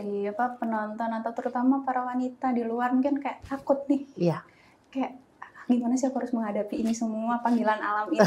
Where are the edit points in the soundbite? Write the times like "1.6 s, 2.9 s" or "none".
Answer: none